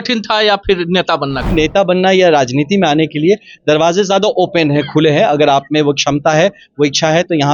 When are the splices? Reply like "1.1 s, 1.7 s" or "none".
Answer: 1.4 s